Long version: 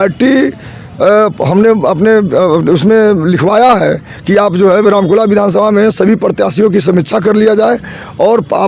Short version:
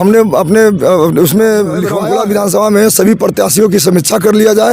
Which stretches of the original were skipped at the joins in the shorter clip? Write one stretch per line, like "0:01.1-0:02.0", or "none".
0:03.5-0:05.0